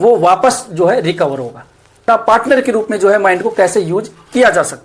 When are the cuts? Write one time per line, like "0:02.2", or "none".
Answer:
0:02.0